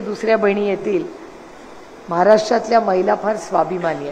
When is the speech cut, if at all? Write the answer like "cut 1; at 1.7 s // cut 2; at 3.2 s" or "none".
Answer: none